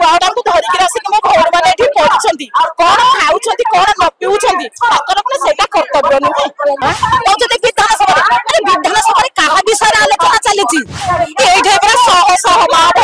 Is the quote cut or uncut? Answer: cut